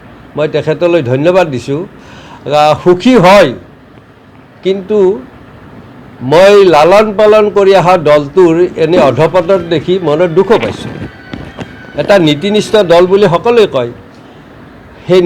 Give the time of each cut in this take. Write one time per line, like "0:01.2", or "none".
none